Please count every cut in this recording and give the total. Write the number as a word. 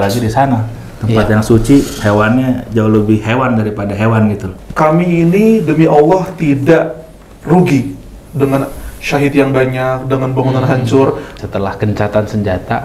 two